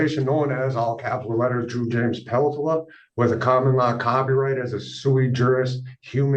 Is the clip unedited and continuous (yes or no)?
yes